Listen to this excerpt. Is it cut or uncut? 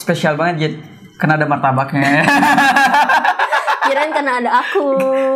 uncut